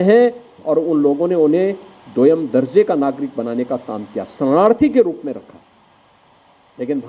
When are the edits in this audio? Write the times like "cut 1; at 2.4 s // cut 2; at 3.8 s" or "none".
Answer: none